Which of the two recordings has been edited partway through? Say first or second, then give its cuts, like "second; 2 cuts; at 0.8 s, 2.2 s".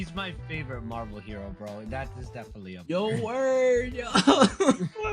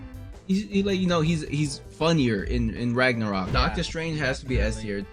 second; 1 cut; at 3.5 s